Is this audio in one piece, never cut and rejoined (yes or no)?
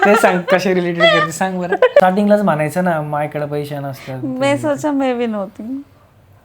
no